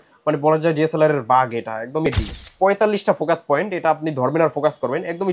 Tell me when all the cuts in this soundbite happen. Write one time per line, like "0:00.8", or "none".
0:02.1